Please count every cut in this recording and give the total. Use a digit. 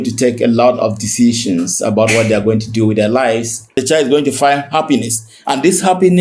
1